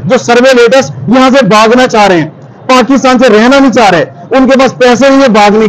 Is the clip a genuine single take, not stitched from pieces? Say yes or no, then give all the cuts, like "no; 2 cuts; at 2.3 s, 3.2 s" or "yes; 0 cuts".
yes; 0 cuts